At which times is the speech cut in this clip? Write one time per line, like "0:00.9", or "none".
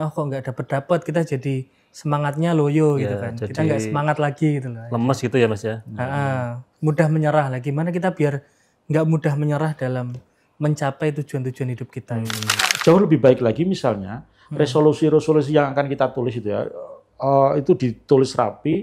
0:12.7